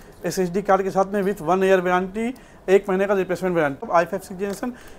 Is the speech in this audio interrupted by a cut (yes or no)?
yes